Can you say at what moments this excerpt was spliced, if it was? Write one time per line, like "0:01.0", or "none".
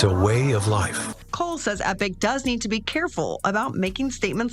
0:01.2